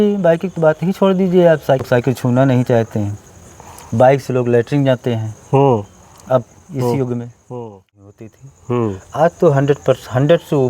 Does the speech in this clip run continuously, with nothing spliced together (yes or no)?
no